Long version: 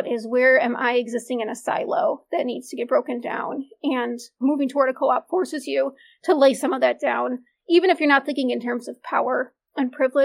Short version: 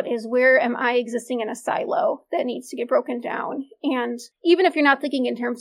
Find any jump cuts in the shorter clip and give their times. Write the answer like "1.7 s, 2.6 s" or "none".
4.2 s